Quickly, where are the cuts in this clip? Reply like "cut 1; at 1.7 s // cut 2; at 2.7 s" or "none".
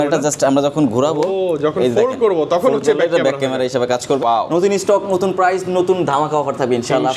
cut 1; at 4.2 s